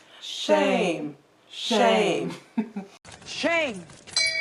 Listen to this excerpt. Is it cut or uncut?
cut